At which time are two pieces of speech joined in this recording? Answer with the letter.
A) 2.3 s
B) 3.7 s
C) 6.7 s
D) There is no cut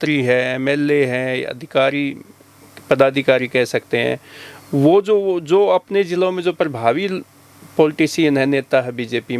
D